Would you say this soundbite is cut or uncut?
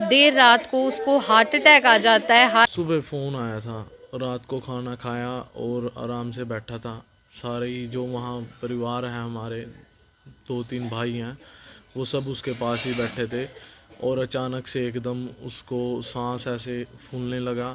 cut